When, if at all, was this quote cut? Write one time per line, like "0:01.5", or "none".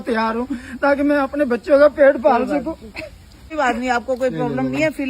0:03.5